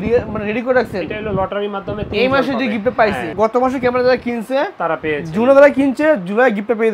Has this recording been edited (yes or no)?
no